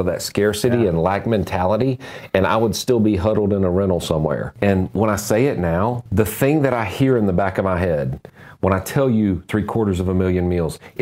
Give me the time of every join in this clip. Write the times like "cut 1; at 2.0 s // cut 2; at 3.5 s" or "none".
cut 1; at 4.5 s // cut 2; at 6.0 s